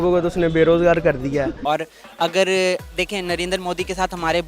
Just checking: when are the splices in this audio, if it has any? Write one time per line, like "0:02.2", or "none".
0:01.6